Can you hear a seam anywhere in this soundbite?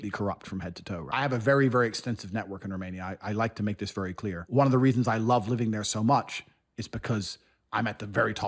yes; 2 cuts; at 1.0 s, 4.4 s

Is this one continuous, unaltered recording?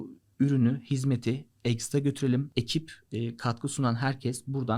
no; 1 cut; at 2.5 s

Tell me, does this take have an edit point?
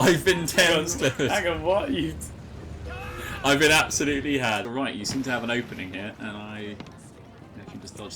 yes; 1 cut; at 4.6 s

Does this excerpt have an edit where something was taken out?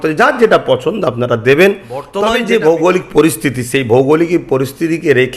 yes; 1 cut; at 2.1 s

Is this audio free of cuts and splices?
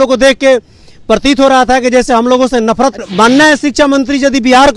no; 1 cut; at 3.0 s

